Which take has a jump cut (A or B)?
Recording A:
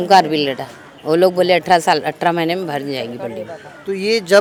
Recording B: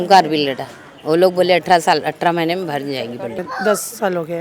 B